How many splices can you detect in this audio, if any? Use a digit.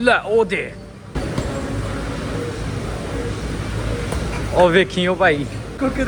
0